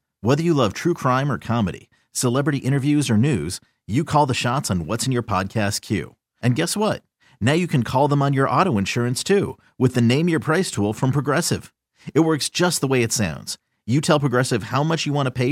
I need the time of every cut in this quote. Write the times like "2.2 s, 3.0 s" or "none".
none

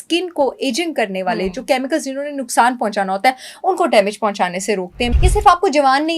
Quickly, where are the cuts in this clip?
4.9 s

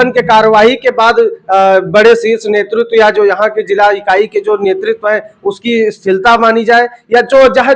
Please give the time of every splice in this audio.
none

